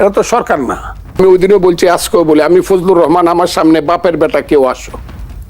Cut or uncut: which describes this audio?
cut